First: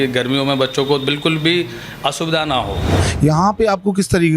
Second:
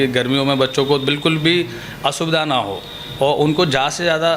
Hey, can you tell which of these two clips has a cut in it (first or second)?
first